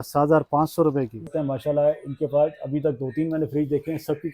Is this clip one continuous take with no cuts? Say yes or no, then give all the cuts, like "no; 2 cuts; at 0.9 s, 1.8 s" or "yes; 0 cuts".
no; 1 cut; at 1.3 s